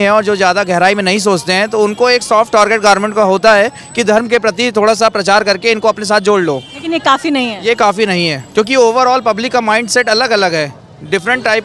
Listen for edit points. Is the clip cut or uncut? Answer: uncut